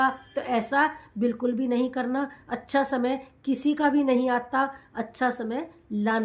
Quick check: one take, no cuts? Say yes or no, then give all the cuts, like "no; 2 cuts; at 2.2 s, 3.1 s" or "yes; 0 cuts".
yes; 0 cuts